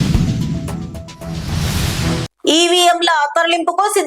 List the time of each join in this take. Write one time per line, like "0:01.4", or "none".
0:02.3